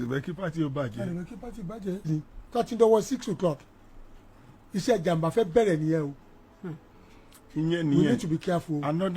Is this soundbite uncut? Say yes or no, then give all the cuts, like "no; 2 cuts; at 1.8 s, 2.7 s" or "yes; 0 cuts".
no; 1 cut; at 2.0 s